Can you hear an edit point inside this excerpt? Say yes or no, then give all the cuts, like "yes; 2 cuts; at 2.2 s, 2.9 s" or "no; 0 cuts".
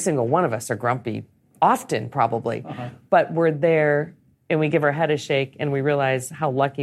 no; 0 cuts